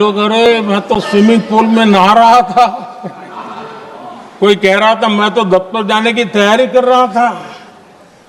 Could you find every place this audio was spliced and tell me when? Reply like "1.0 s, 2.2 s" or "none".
none